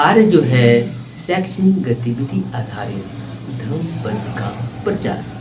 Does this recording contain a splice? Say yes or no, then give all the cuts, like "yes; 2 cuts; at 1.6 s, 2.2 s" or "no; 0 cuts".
no; 0 cuts